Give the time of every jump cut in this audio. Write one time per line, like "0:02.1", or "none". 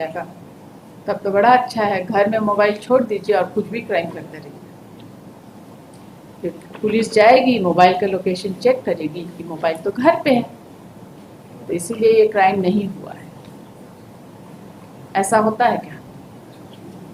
none